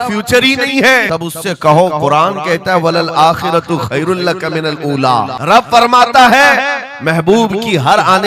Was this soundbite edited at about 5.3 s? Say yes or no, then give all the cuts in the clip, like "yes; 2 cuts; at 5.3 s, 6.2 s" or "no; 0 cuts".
yes; 2 cuts; at 1.1 s, 5.3 s